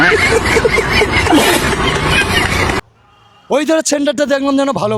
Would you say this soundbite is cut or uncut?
cut